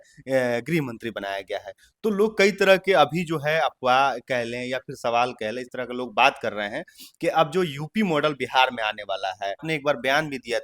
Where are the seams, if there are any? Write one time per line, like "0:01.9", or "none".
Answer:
0:09.6